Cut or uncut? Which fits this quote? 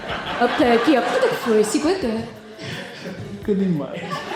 uncut